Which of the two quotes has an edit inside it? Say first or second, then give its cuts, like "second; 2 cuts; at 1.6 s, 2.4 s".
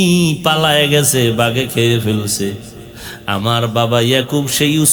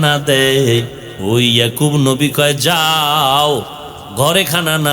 second; 1 cut; at 1.0 s